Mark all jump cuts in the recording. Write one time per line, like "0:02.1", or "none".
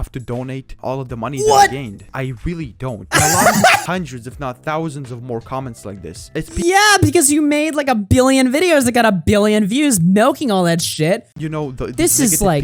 0:03.8
0:11.4